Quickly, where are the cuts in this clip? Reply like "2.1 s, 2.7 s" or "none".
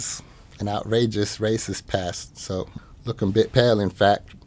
2.8 s